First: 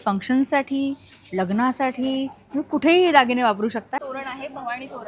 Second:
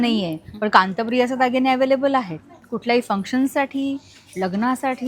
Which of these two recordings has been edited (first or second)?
first